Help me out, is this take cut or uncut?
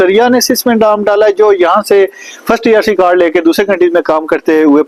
uncut